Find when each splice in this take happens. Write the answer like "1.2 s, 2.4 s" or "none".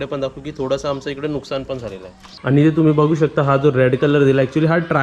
2.3 s